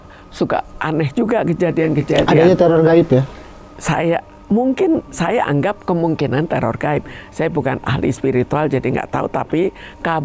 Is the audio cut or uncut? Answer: uncut